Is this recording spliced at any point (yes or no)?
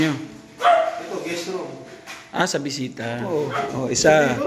yes